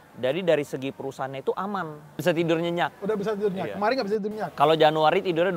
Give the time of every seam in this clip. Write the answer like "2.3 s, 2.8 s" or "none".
2.2 s